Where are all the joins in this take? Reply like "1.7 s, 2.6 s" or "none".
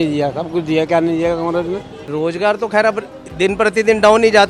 2.1 s